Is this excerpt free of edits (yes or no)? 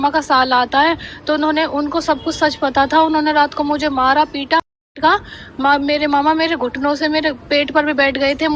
no